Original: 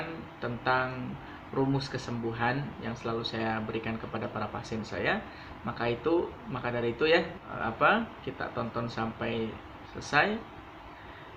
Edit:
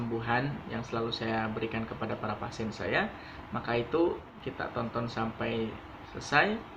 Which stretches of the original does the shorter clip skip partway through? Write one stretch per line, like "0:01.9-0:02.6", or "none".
0:06.5-0:08.2

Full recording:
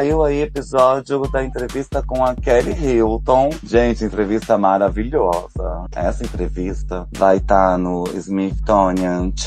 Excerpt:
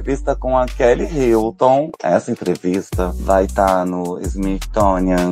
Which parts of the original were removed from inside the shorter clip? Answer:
0:03.6-0:05.9

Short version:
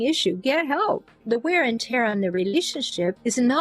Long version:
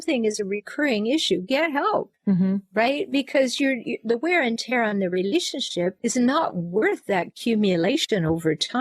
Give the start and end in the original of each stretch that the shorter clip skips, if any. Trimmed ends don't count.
0:02.1-0:03.9

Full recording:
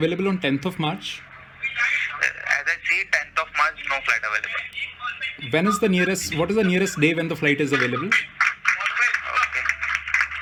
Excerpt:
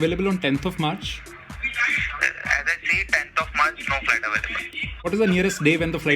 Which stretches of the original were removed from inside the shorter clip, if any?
0:05.1-0:06.5

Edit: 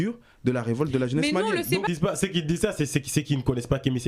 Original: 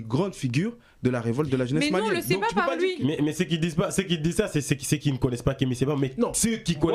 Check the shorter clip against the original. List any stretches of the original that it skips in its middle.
0:02.4-0:03.6

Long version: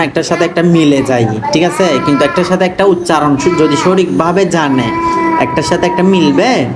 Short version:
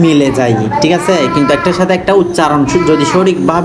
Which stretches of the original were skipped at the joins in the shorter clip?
none

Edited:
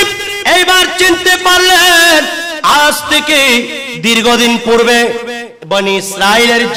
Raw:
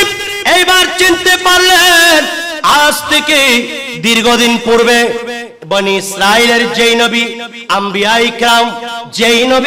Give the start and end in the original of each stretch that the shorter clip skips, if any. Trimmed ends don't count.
none

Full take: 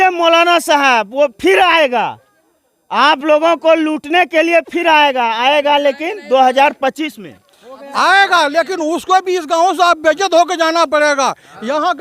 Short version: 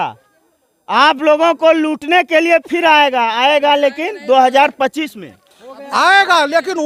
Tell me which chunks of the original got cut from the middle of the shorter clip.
none

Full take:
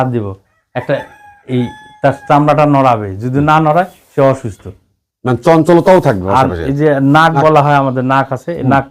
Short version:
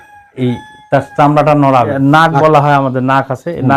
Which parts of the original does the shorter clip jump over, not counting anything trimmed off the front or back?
0:03.1-0:07.0

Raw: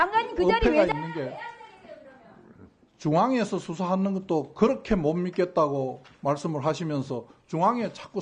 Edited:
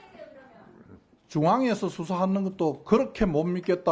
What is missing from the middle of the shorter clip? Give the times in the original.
none

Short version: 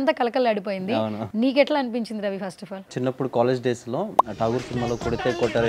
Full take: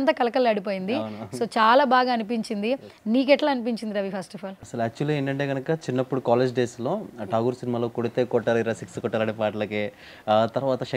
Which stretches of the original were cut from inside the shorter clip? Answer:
0:01.2-0:02.9
0:04.6-0:05.8

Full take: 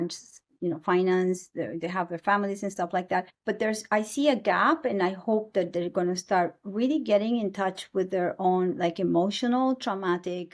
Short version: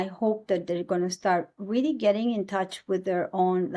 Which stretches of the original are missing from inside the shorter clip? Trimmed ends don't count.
none

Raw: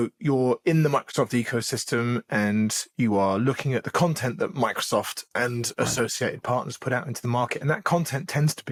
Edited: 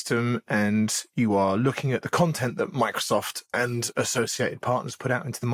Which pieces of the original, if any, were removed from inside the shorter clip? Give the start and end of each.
none

